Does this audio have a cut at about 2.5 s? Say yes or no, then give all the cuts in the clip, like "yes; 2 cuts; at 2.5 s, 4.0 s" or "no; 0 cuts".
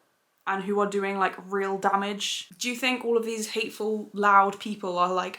yes; 1 cut; at 2.5 s